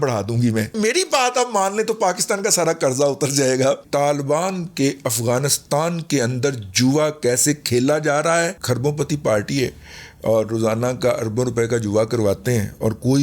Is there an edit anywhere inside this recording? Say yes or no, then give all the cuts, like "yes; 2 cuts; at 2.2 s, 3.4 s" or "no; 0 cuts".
yes; 3 cuts; at 0.7 s, 3.8 s, 8.6 s